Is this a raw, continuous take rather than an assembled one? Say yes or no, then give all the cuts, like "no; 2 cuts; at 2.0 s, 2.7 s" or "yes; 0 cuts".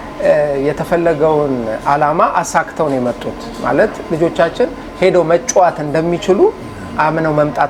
yes; 0 cuts